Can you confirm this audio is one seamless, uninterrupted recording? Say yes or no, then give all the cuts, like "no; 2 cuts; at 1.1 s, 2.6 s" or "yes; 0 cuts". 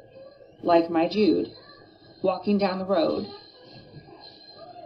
yes; 0 cuts